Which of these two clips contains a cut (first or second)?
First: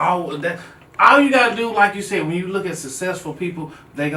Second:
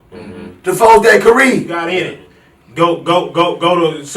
second